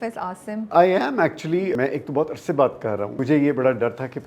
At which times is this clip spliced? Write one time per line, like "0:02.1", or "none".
0:01.7
0:03.2